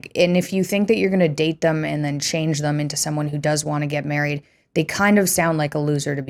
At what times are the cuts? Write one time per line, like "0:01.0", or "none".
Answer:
none